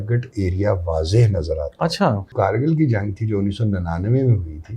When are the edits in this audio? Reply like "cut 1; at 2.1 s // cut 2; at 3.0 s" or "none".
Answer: cut 1; at 2.3 s